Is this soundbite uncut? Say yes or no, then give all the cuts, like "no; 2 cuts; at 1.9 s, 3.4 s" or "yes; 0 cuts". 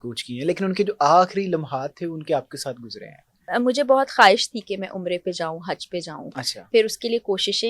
no; 1 cut; at 3.5 s